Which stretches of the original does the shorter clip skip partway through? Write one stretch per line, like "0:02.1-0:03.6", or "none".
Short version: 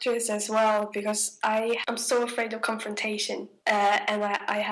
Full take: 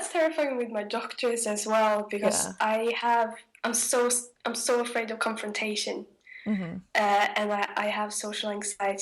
0:03.0-0:04.4
0:06.1-0:06.8